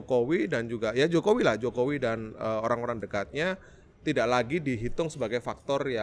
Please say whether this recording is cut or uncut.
uncut